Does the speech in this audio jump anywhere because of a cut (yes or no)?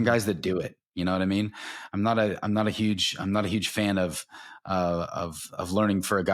no